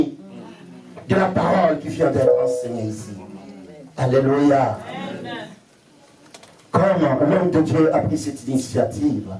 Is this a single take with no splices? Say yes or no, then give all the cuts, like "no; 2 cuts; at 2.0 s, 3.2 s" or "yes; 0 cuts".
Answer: yes; 0 cuts